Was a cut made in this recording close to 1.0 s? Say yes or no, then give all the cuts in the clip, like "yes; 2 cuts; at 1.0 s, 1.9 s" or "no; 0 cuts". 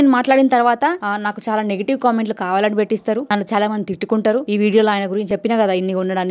yes; 4 cuts; at 1.0 s, 3.3 s, 4.5 s, 5.3 s